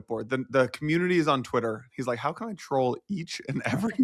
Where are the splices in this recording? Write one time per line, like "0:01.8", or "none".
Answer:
none